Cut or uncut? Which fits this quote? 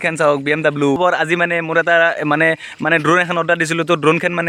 cut